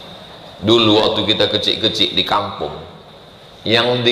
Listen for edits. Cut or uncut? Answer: uncut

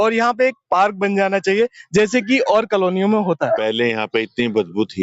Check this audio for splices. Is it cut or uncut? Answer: cut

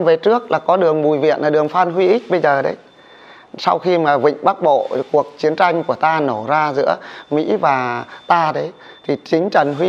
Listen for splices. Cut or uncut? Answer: uncut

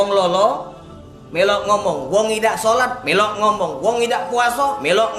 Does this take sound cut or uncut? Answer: uncut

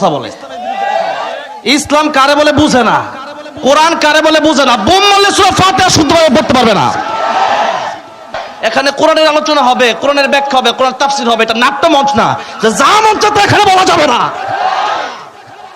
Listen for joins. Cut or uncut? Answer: cut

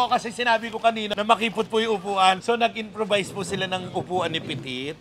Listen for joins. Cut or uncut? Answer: uncut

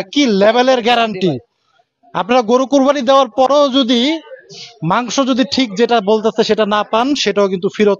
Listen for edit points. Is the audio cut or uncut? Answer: uncut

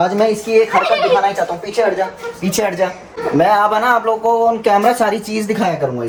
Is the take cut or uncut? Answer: uncut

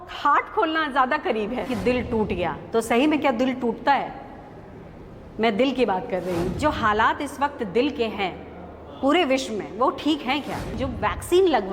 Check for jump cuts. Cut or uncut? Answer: cut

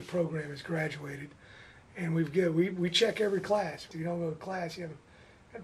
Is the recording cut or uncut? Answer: cut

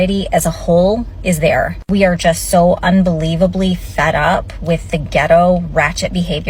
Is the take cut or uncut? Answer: uncut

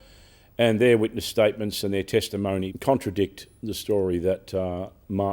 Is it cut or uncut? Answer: cut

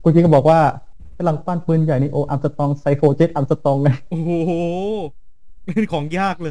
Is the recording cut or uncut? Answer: uncut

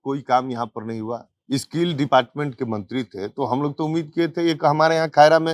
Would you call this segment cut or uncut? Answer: uncut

